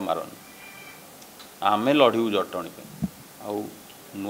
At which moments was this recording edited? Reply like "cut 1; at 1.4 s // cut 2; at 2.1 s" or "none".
cut 1; at 3.3 s